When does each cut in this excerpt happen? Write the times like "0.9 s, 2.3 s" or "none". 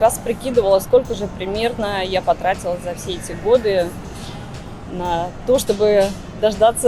none